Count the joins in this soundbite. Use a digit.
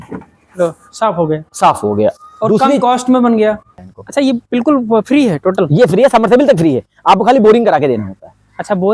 1